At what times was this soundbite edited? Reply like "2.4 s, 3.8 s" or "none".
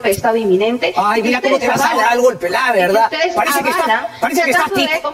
none